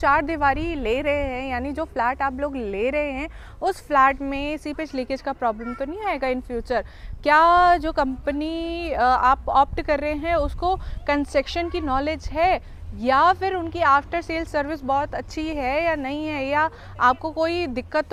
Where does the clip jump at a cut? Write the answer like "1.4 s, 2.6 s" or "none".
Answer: none